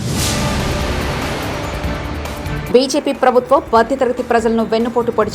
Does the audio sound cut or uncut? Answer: cut